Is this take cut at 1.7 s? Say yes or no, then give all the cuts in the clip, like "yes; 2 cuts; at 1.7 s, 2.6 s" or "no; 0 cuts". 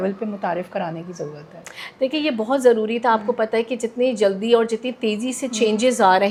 no; 0 cuts